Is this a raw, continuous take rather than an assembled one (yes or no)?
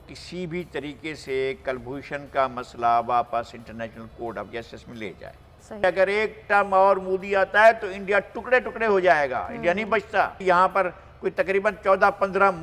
no